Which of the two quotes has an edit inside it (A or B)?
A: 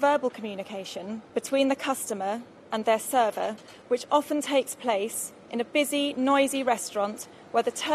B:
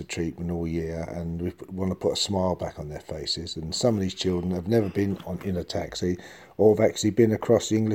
A